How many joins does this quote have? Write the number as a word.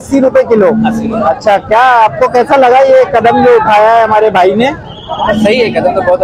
zero